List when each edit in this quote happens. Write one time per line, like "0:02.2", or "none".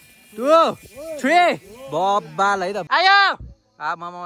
0:02.8